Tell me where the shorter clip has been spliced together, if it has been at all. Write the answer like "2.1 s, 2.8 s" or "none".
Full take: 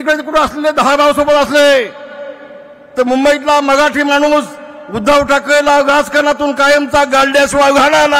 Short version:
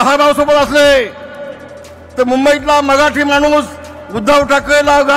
none